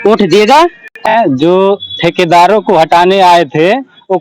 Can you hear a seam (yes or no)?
yes